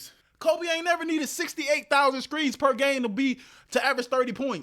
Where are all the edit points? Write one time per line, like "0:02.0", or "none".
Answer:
none